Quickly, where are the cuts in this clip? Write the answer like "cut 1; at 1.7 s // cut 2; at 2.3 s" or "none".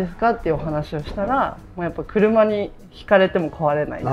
none